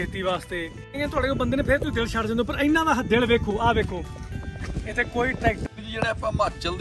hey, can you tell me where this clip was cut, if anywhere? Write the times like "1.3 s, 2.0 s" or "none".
0.9 s, 5.6 s